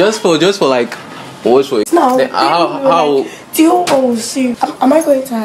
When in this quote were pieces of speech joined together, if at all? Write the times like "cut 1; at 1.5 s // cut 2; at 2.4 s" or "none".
cut 1; at 4.5 s